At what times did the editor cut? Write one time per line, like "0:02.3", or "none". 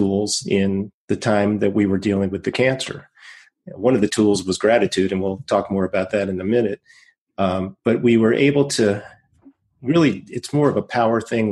0:00.9

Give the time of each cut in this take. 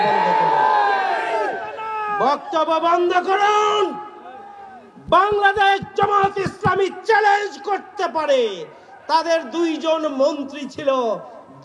none

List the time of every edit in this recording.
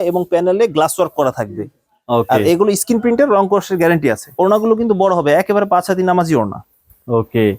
none

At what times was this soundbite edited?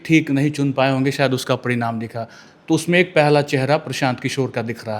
0:02.4

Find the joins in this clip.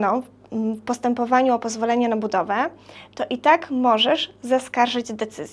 none

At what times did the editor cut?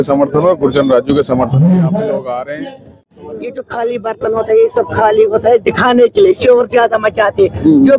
0:03.1

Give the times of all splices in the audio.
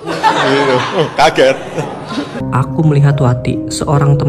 0:02.4

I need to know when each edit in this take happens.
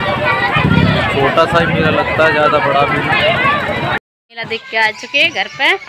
0:04.3

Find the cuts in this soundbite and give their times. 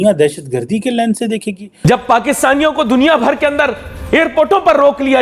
0:01.7

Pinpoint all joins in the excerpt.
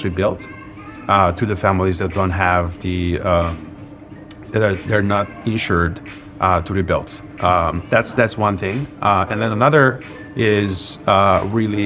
none

